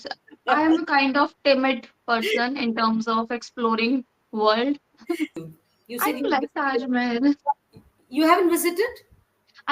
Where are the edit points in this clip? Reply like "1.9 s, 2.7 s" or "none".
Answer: 5.4 s